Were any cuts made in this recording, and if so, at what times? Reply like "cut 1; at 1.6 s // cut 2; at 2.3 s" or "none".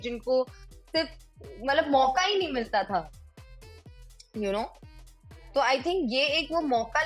none